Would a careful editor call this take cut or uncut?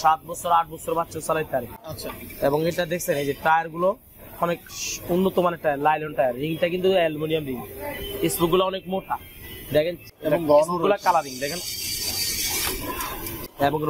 uncut